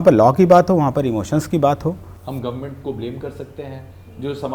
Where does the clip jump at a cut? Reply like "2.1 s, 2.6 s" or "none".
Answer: 2.1 s